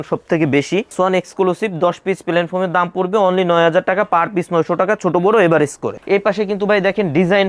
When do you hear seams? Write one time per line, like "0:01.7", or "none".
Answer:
none